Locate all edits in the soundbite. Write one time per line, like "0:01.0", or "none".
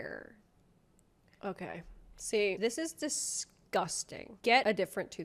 none